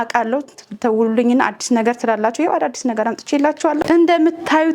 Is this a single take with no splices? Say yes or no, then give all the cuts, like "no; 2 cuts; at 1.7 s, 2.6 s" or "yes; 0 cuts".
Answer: no; 1 cut; at 3.8 s